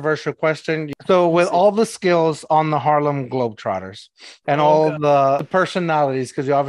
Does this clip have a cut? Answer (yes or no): yes